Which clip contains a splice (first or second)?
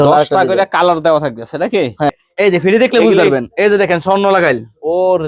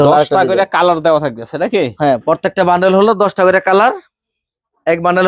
first